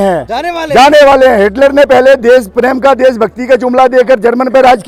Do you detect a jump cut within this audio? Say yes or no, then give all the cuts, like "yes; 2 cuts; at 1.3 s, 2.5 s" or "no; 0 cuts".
no; 0 cuts